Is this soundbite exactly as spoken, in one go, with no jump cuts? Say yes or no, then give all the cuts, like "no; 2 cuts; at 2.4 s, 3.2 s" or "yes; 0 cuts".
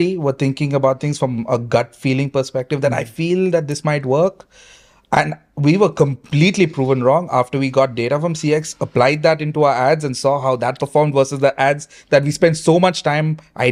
yes; 0 cuts